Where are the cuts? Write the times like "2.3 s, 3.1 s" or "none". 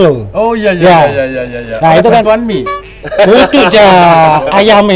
none